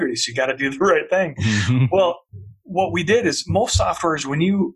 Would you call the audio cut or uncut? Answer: cut